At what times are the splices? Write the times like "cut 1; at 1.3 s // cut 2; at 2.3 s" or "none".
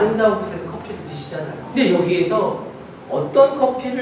cut 1; at 1.7 s